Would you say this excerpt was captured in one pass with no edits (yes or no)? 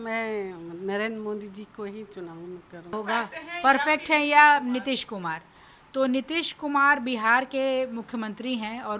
no